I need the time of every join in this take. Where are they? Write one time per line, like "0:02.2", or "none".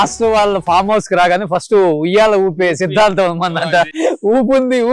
0:03.9